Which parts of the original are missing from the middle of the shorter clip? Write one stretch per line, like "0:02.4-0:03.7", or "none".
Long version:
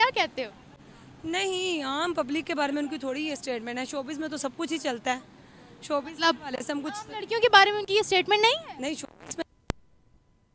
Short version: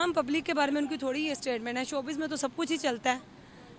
none